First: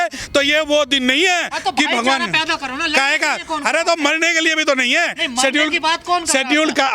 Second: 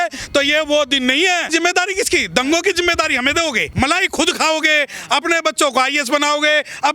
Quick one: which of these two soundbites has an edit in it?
second; 1 cut; at 1.5 s

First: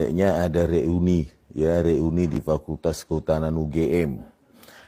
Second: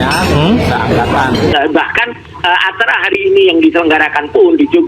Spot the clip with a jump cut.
second; 1 cut; at 1.5 s

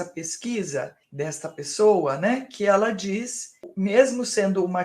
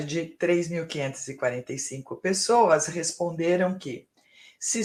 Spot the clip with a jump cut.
first; 2 cuts; at 1.0 s, 3.6 s

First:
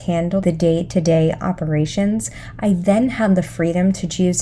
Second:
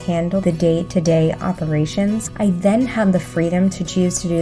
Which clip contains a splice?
second; 1 cut; at 2.3 s

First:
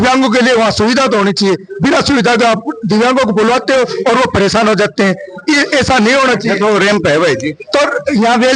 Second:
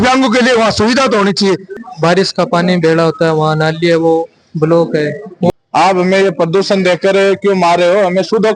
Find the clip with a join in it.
second; 2 cuts; at 1.7 s, 5.5 s

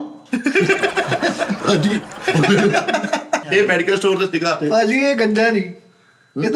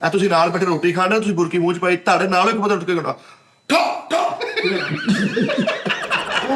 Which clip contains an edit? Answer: first; 1 cut; at 3.4 s

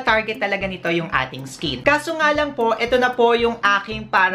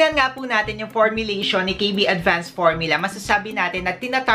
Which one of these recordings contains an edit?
first; 1 cut; at 1.8 s

